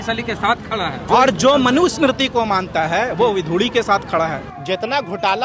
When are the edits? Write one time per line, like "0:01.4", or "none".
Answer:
0:01.0
0:04.5